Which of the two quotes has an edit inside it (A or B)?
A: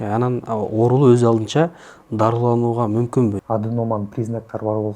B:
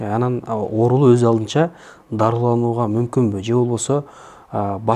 A